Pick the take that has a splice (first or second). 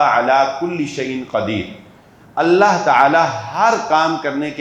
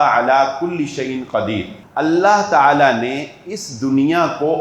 second